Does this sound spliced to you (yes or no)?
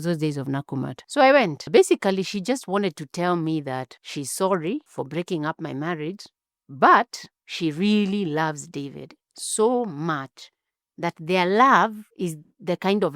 yes